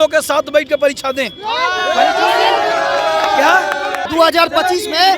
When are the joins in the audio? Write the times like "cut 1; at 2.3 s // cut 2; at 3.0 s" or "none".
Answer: cut 1; at 4.0 s